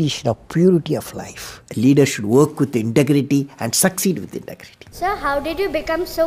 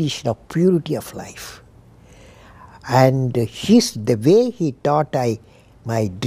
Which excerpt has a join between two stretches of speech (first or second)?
first